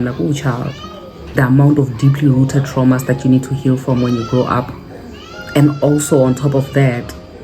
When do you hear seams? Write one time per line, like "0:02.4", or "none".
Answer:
0:01.4

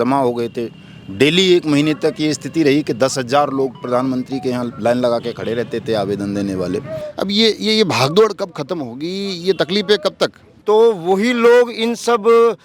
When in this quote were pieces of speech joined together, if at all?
0:07.0
0:10.5

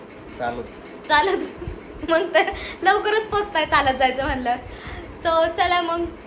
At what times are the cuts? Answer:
none

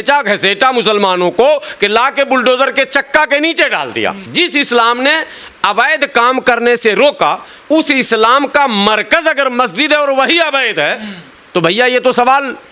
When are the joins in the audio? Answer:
0:04.2

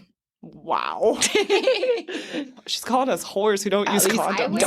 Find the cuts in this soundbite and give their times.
0:02.6

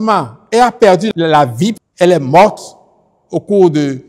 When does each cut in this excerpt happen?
0:01.8

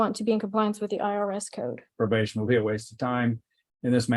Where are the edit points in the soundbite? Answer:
0:01.9

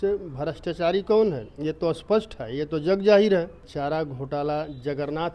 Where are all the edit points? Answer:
0:03.6

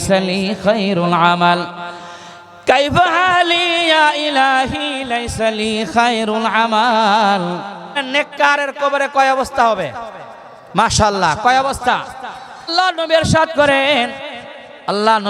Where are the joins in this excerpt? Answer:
0:08.0
0:12.7

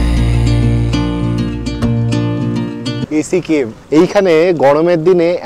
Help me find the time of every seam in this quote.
0:03.4

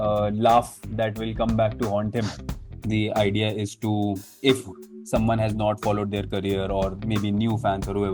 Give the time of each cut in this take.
0:02.8

